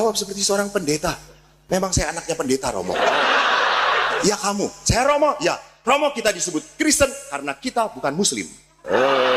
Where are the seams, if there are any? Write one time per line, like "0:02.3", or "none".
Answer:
0:04.2